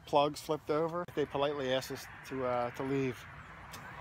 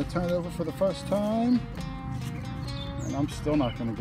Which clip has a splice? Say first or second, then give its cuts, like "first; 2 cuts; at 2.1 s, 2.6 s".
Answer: first; 1 cut; at 1.1 s